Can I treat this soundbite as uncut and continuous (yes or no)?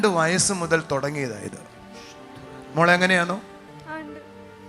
yes